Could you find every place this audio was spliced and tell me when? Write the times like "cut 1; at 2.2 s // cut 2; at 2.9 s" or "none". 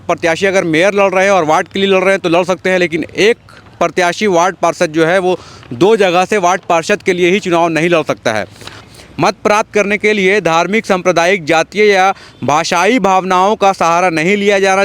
cut 1; at 8.8 s